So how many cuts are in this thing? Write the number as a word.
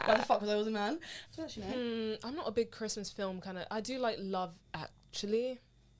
one